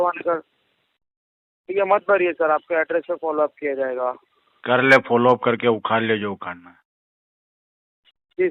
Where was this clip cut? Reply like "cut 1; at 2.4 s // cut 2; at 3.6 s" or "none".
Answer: none